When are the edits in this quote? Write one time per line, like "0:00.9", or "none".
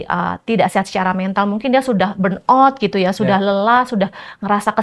none

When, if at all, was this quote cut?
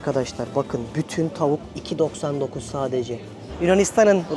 0:01.7
0:03.5

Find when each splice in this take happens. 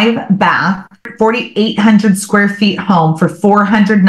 0:01.1

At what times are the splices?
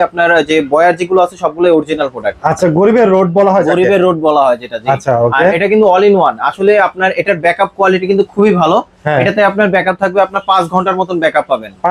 0:02.6

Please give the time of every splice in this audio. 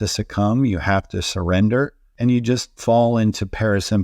0:02.0

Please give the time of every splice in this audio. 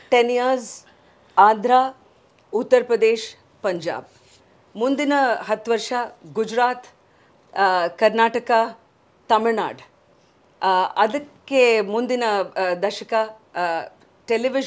none

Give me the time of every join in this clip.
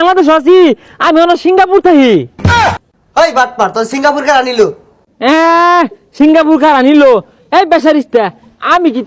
none

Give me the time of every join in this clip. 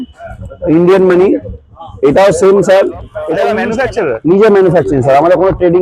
0:03.6

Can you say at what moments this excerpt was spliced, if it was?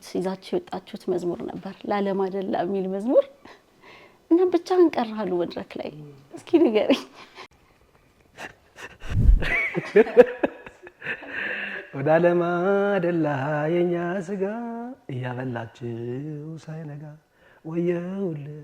0:09.2

